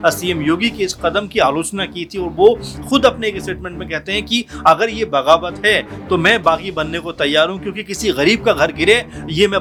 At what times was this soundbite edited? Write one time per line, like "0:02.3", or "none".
none